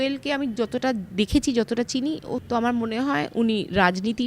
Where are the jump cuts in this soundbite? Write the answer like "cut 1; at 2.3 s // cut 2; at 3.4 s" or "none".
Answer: cut 1; at 2.3 s

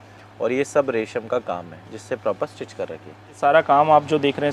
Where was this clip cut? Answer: cut 1; at 3.4 s

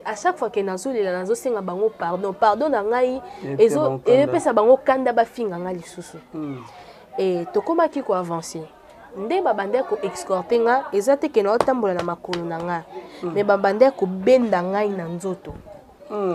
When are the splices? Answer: none

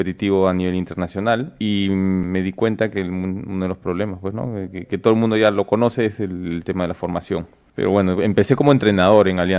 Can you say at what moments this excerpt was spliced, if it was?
cut 1; at 1.5 s // cut 2; at 2.2 s // cut 3; at 7.6 s

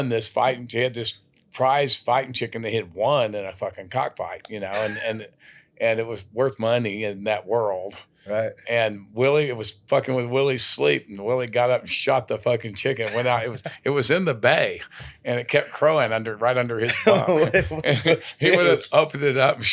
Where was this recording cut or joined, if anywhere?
none

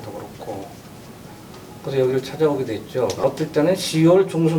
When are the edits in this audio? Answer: cut 1; at 3.2 s

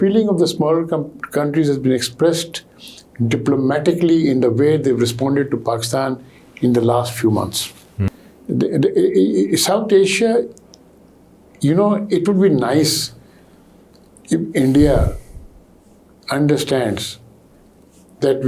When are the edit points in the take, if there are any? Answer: cut 1; at 8.0 s

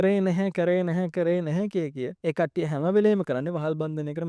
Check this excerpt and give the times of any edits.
cut 1; at 2.1 s

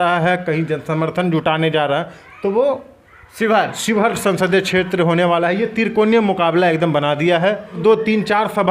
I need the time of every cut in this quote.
cut 1; at 7.8 s

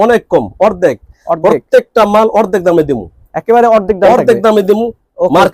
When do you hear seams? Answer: none

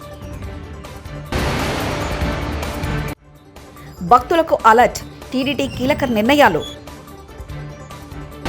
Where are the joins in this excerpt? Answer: cut 1; at 1.3 s // cut 2; at 3.3 s

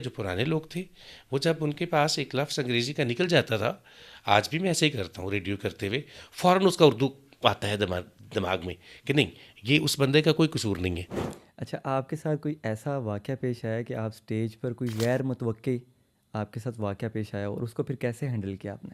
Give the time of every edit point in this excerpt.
cut 1; at 11.1 s

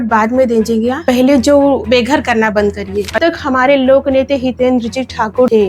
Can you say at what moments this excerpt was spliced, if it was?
cut 1; at 1.8 s // cut 2; at 3.2 s

